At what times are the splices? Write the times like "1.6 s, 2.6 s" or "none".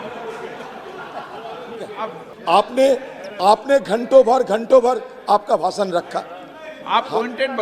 2.3 s